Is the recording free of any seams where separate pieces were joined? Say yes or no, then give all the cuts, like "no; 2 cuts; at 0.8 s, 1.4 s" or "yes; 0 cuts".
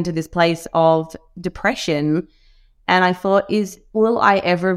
yes; 0 cuts